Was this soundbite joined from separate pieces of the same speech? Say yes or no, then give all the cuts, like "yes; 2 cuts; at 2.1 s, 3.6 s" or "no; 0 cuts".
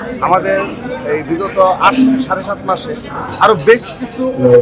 no; 0 cuts